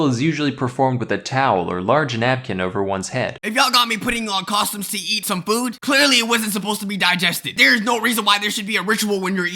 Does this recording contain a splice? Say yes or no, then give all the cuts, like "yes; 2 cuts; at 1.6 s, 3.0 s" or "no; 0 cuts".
yes; 2 cuts; at 3.4 s, 5.1 s